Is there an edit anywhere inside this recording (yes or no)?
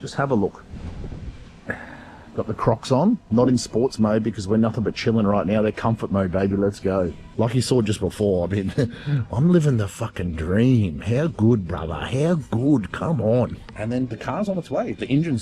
yes